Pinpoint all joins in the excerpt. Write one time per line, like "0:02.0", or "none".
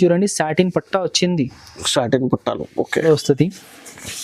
0:03.0